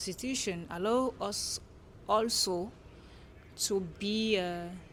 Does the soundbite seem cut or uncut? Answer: uncut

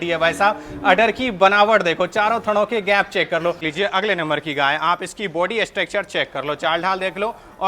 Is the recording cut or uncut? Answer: cut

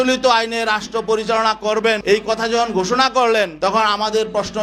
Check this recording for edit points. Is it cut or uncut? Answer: uncut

